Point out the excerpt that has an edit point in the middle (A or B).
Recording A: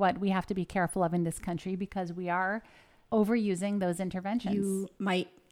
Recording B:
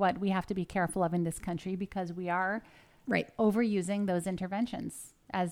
A